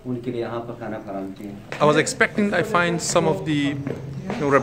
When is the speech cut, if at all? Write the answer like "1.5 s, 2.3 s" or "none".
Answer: 1.6 s